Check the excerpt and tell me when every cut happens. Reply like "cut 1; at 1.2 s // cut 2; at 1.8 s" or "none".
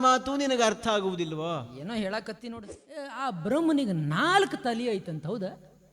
cut 1; at 3.1 s